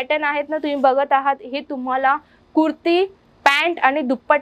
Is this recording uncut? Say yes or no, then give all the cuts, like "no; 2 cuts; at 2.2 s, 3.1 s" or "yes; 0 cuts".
yes; 0 cuts